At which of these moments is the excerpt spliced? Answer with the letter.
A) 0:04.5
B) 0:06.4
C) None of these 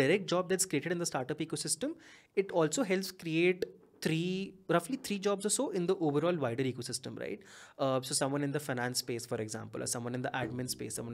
C